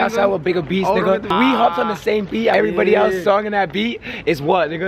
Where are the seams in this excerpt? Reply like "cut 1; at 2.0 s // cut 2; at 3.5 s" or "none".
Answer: cut 1; at 1.3 s // cut 2; at 2.5 s